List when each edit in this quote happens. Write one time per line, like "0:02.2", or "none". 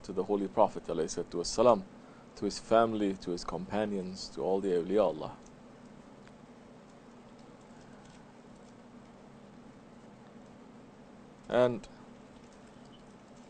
none